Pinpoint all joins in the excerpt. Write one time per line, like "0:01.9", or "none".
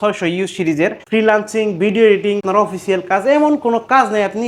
0:01.0
0:02.4